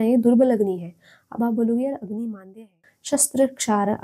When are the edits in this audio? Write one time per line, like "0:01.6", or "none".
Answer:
0:02.9